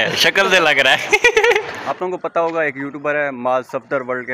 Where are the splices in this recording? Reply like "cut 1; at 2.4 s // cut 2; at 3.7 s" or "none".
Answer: cut 1; at 1.8 s